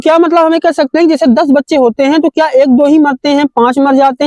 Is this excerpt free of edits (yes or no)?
yes